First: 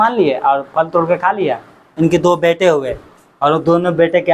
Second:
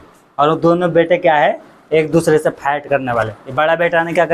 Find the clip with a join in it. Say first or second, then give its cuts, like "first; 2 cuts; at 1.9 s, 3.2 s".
first; 1 cut; at 1.9 s